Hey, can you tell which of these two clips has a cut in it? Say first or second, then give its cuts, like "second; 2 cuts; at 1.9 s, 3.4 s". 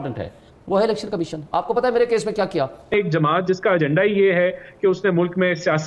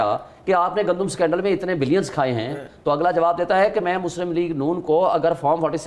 first; 1 cut; at 2.9 s